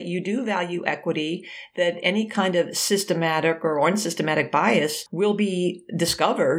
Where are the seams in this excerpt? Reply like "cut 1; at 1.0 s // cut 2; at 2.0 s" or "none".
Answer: cut 1; at 5.0 s